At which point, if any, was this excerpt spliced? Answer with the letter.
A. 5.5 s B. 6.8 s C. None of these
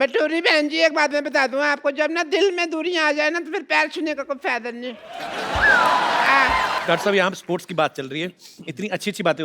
B